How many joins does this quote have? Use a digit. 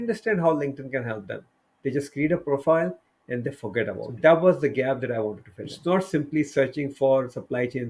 2